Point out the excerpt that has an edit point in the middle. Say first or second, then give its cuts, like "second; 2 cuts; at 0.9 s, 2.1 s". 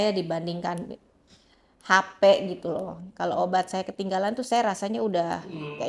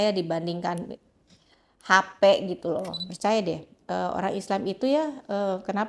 second; 1 cut; at 3.0 s